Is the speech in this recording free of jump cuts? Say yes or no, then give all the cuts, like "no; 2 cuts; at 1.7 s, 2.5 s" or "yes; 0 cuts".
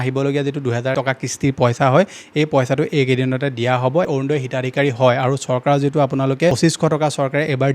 no; 2 cuts; at 0.9 s, 4.1 s